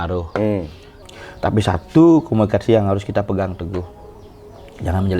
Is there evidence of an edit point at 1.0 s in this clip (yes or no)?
yes